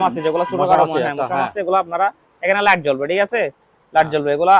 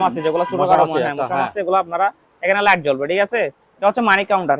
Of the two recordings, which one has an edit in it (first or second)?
second